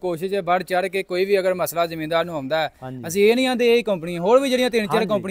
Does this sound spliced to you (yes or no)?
no